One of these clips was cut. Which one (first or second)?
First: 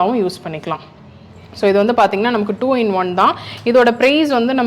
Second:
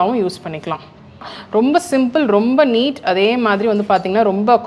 second